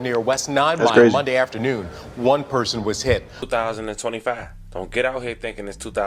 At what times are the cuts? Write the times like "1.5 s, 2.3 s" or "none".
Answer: 3.5 s